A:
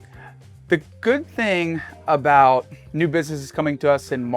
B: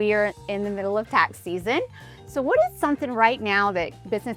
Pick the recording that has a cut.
A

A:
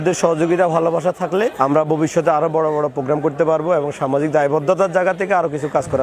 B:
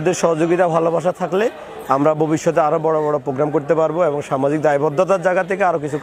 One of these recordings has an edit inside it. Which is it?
A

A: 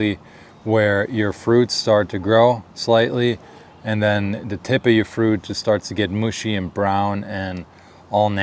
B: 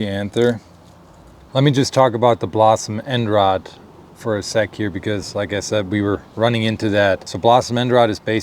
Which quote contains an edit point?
B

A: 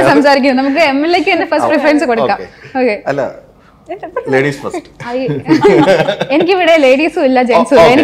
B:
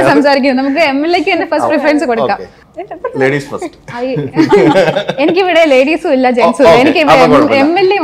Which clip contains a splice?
B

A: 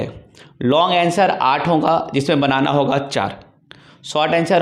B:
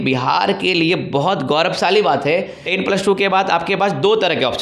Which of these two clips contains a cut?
B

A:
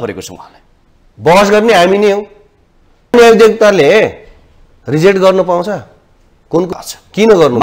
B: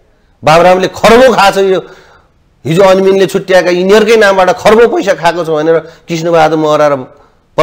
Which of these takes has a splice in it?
A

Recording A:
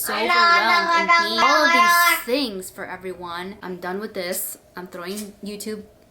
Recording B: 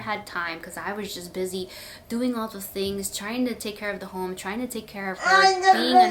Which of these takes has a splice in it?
A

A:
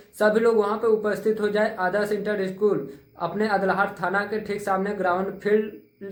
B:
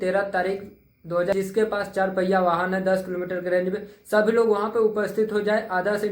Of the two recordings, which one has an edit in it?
B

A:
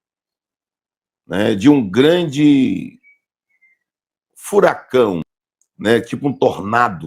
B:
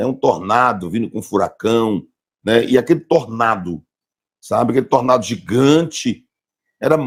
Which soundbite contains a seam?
A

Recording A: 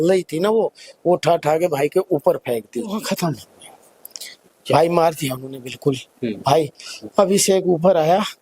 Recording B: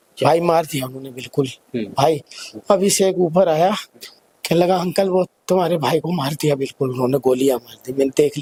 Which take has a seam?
A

